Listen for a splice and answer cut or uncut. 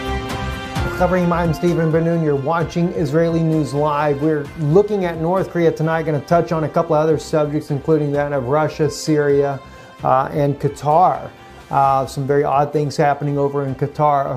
cut